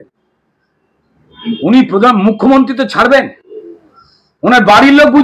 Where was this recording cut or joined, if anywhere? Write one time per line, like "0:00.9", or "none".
none